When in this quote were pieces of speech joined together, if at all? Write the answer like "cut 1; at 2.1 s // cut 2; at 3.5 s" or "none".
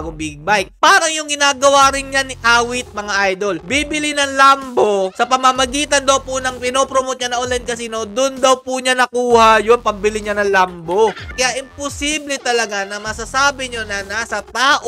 cut 1; at 11.3 s